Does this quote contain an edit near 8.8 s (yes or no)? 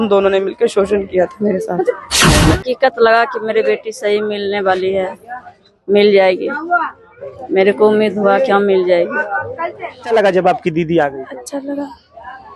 no